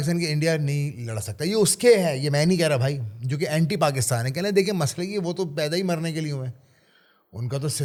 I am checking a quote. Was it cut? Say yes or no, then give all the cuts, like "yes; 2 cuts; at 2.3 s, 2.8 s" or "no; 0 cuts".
no; 0 cuts